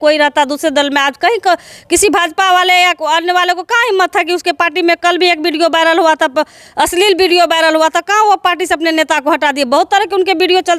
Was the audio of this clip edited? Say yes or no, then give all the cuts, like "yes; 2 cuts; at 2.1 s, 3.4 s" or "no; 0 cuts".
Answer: no; 0 cuts